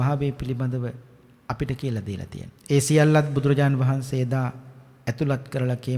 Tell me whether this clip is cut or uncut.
cut